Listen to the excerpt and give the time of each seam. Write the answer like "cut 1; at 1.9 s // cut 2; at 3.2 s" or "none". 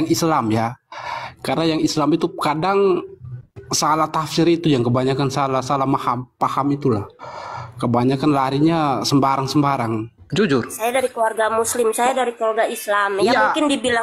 cut 1; at 10.2 s